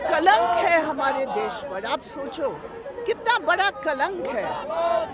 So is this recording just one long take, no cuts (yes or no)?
yes